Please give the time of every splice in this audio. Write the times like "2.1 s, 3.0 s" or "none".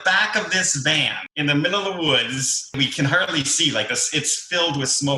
1.2 s, 2.7 s